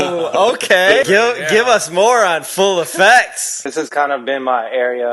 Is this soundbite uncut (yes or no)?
no